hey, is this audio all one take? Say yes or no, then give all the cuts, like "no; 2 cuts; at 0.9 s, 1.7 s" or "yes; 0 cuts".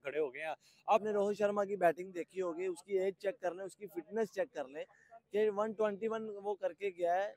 no; 1 cut; at 1.0 s